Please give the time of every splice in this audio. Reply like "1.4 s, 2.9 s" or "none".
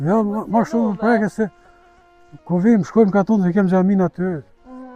none